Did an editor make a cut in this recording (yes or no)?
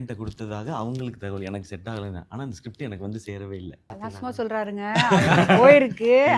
yes